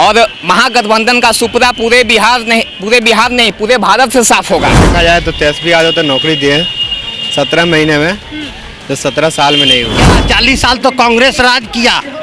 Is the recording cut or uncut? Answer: cut